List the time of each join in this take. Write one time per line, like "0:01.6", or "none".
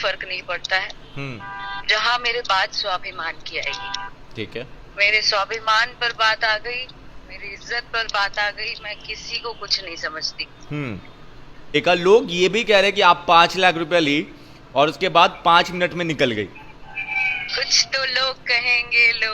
0:11.6